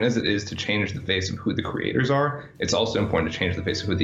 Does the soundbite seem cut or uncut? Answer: uncut